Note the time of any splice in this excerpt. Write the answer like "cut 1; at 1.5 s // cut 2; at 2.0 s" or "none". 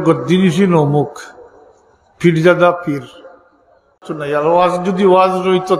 cut 1; at 4.1 s